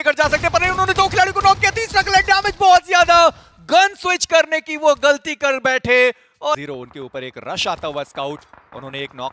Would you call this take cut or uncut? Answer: uncut